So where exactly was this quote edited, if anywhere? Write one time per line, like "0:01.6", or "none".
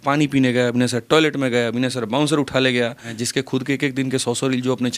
0:03.1